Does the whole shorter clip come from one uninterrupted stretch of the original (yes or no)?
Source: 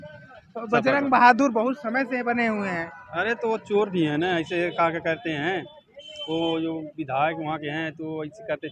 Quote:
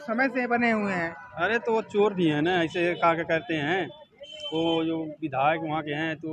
yes